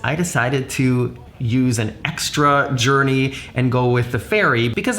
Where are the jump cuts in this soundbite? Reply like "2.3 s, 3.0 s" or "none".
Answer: 1.3 s

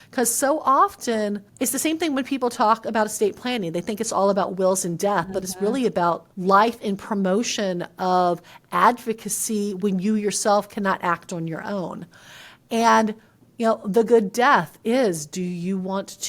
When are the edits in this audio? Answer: 1.5 s, 6.3 s

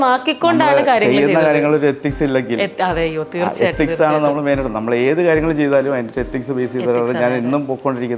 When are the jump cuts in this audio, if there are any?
none

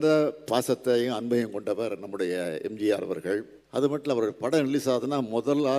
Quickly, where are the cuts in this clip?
3.6 s

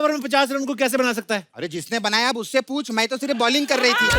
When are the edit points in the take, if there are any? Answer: 1.5 s

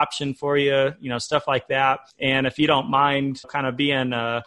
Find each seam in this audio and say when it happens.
2.1 s, 3.5 s

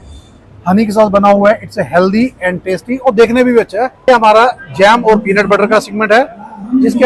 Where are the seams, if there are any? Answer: 4.0 s

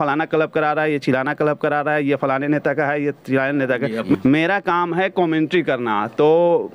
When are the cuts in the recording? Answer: 4.2 s

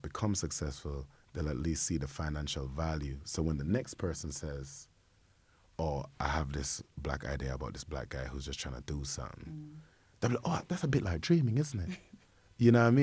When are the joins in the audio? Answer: none

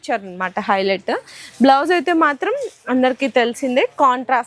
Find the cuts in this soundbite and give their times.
none

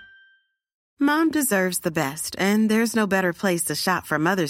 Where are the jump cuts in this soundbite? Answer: none

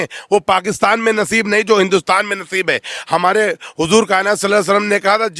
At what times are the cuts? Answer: none

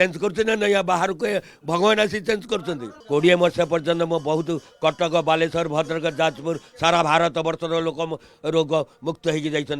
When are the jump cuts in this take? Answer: 2.9 s

